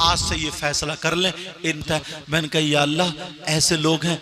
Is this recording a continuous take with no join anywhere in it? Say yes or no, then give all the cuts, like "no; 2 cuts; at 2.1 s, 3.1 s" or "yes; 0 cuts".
no; 1 cut; at 1.9 s